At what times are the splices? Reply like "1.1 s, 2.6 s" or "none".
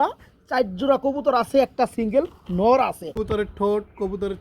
3.2 s

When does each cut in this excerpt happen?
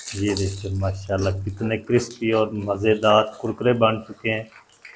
none

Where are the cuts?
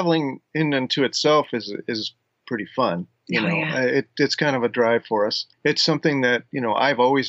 5.5 s

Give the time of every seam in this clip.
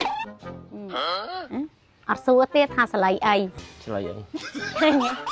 3.6 s

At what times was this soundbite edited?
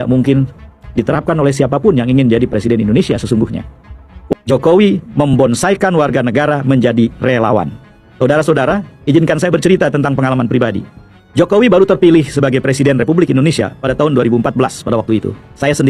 4.1 s

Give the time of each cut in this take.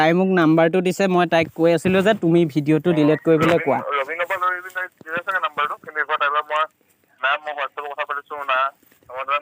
none

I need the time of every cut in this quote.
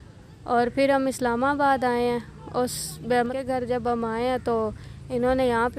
3.3 s

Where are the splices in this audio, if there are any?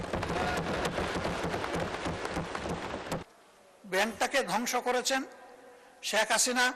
3.3 s

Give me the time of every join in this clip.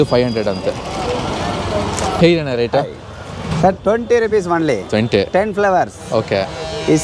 none

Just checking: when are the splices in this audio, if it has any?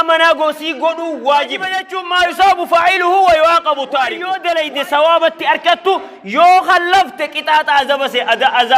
2.0 s, 4.3 s

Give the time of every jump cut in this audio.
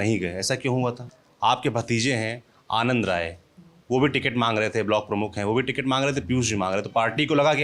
1.1 s

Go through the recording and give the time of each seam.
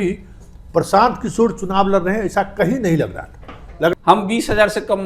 3.9 s

